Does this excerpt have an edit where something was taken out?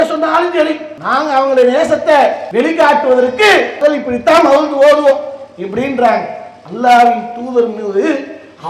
yes; 3 cuts; at 0.9 s, 2.4 s, 3.8 s

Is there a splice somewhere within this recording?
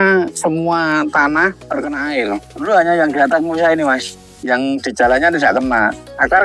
no; 0 cuts

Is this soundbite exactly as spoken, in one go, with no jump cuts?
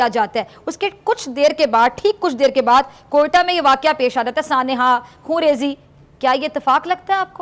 yes; 0 cuts

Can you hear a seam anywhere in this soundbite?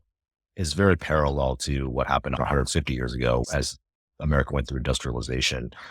yes; 2 cuts; at 2.3 s, 3.4 s

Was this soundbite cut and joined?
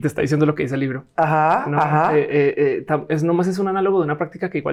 no; 0 cuts

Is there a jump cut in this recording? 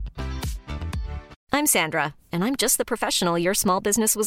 yes; 1 cut; at 1.3 s

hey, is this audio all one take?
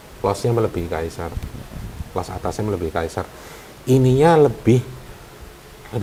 yes; 0 cuts

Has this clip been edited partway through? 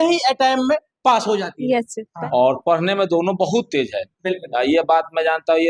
yes; 1 cut; at 2.1 s

